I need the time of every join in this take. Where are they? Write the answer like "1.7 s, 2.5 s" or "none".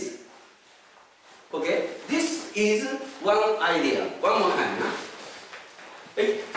5.6 s